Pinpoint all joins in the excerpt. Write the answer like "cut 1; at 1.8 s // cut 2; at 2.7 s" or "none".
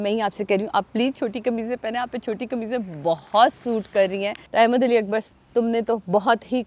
cut 1; at 4.4 s